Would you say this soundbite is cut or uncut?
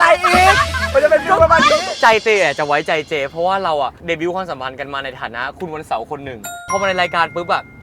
cut